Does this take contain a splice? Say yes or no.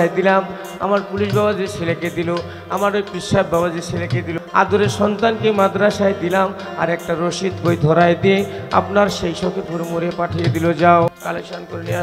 yes